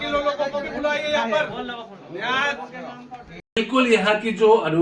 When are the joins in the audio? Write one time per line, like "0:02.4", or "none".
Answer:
0:03.6

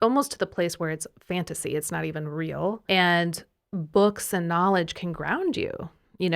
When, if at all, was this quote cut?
0:02.8

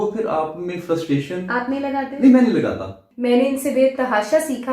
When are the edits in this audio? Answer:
0:03.0

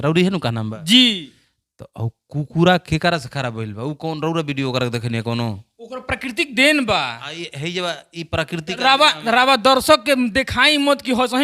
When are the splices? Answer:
none

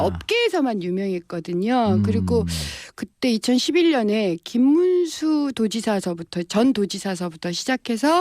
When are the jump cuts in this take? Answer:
0:06.1

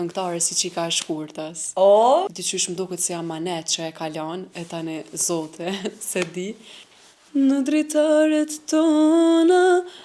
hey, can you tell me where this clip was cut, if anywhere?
0:02.3
0:06.9

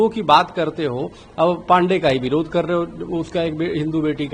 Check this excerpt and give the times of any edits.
none

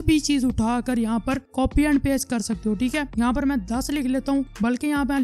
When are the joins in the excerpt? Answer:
0:03.1

